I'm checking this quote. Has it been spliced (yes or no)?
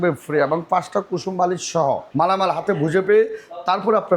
yes